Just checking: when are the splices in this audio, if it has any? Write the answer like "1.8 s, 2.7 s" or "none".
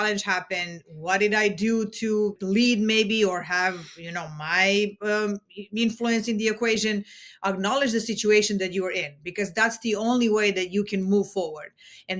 2.4 s